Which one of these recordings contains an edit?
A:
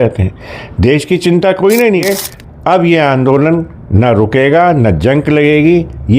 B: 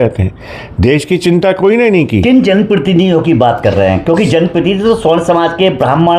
A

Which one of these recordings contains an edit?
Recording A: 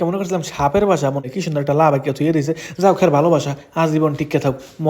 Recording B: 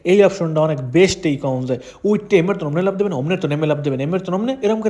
A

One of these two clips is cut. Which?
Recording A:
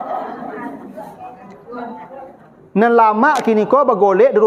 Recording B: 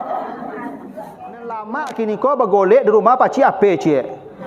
B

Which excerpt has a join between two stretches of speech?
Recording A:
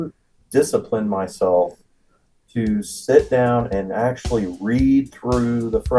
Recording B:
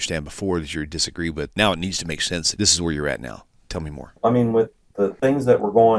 B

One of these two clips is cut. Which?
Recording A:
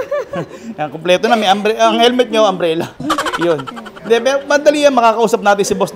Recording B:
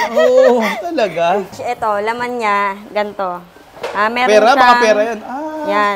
B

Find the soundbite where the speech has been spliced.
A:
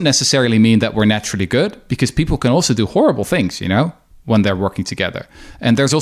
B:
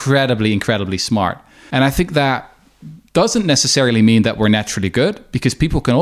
B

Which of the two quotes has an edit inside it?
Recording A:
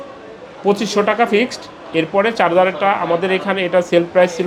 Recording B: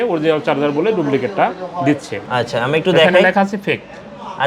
B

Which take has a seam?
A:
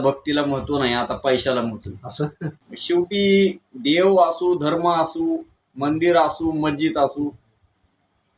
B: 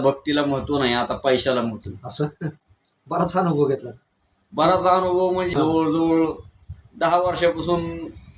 A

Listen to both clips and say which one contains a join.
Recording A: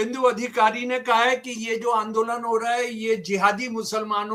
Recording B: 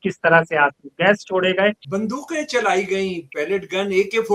B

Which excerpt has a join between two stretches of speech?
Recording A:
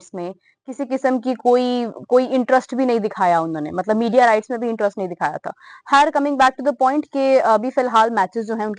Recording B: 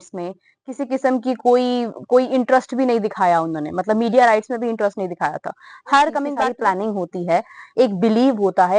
B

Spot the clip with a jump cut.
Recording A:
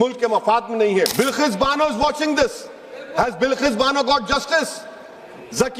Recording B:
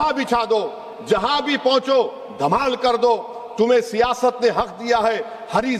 A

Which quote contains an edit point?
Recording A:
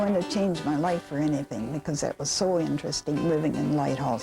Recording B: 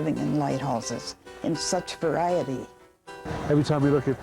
B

